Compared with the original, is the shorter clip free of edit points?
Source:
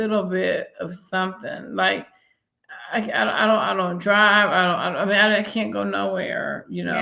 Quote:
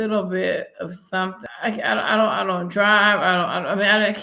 no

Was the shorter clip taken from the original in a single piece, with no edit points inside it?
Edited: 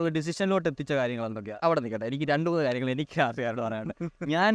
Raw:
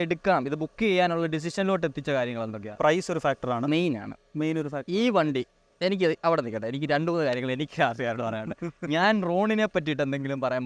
no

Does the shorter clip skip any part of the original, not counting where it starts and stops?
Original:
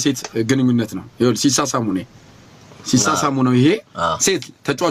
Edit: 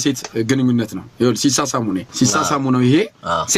yes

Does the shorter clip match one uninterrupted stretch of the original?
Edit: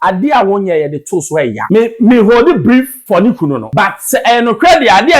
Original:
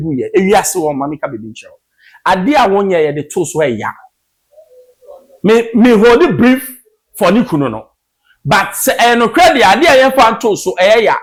no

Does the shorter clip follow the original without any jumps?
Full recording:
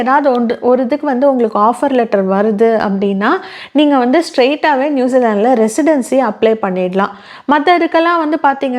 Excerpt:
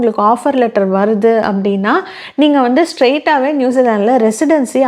yes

